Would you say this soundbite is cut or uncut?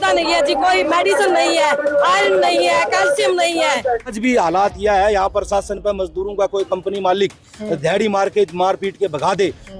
cut